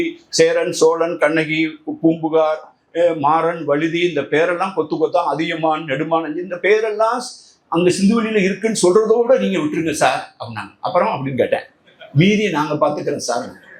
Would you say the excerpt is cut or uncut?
uncut